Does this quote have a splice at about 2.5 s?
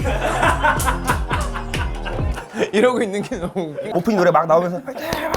no; 1 cut; at 3.7 s

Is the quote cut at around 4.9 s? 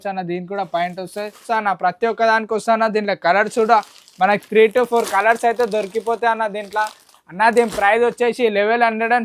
no; 1 cut; at 1.5 s

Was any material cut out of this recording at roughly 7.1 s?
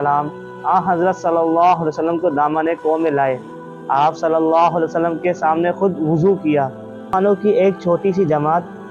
yes; 1 cut; at 7.1 s

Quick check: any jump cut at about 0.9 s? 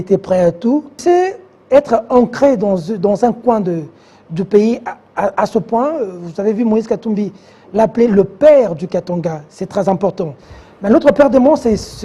yes; 1 cut; at 0.9 s

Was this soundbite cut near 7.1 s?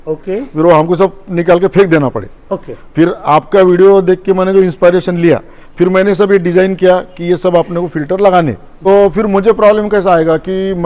no; 1 cut; at 8.7 s

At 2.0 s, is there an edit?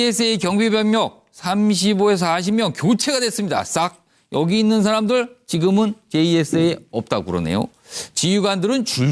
no; 1 cut; at 6.6 s

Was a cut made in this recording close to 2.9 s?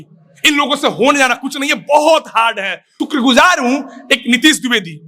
yes; 1 cut; at 2.9 s

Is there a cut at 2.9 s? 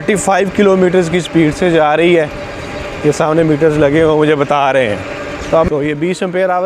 no; 1 cut; at 5.7 s

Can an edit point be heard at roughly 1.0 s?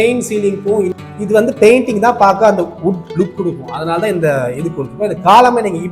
yes; 1 cut; at 1.0 s

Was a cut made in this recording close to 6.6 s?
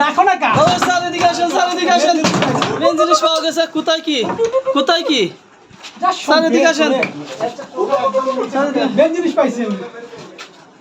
no; 0 cuts

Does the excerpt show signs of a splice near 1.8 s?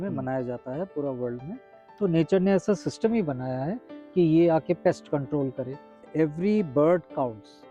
yes; 2 cuts; at 1.8 s, 6.0 s

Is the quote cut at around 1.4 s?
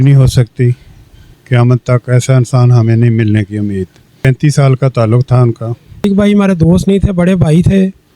no; 2 cuts; at 4.2 s, 6.0 s

